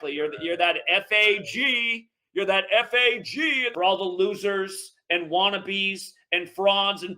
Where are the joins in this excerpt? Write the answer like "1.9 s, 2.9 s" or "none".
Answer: 3.6 s